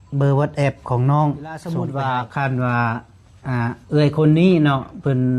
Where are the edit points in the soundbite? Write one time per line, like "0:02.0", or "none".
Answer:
0:01.6